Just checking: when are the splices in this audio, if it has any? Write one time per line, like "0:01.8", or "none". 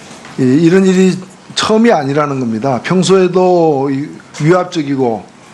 none